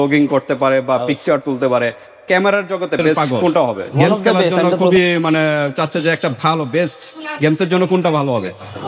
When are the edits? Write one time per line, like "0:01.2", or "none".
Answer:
0:04.9